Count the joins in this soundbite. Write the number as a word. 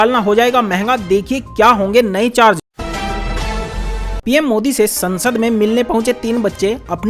two